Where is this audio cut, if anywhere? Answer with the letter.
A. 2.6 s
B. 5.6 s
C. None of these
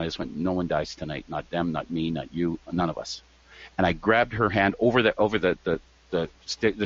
C